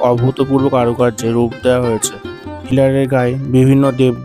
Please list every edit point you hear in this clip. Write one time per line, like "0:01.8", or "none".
0:02.7